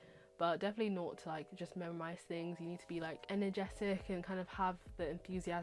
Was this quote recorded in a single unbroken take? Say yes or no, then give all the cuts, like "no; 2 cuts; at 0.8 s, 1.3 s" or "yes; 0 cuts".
no; 1 cut; at 3.2 s